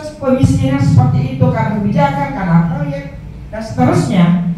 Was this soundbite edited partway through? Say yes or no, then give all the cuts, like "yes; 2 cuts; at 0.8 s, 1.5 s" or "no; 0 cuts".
no; 0 cuts